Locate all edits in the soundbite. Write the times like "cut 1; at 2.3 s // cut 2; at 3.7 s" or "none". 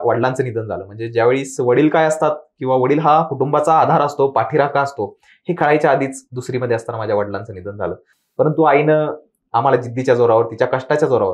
none